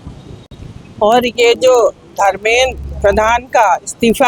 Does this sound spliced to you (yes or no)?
no